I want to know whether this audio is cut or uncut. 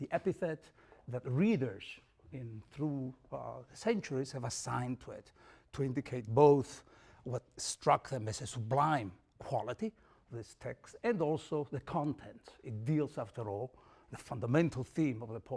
uncut